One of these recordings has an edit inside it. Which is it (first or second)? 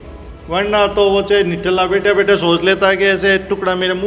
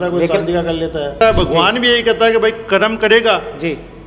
second